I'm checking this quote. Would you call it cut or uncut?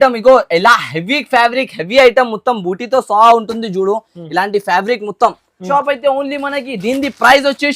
cut